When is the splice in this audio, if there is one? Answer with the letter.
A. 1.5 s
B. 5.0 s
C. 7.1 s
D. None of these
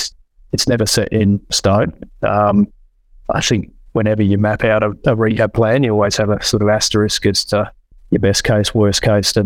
A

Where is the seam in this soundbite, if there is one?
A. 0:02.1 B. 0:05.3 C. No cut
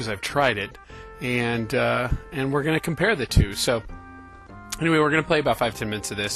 B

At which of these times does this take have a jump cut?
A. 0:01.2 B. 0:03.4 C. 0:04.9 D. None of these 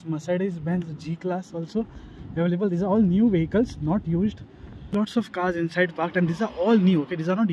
C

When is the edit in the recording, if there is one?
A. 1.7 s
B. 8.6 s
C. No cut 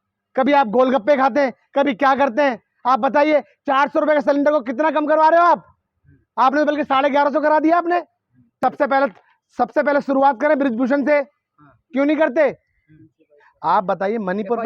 B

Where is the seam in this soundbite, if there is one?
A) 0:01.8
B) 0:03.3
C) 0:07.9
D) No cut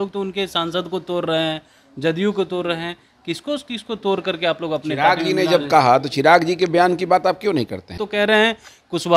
C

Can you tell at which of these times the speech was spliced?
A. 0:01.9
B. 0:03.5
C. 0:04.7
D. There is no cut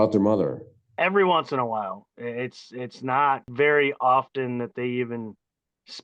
B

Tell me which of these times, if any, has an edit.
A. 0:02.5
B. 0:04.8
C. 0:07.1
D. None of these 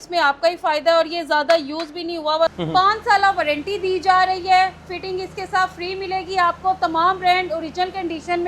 A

